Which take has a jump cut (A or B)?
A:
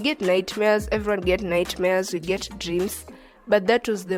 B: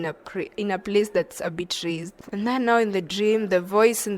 B